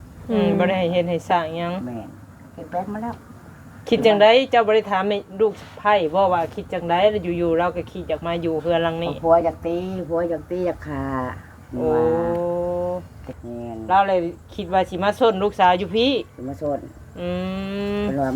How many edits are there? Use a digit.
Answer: 1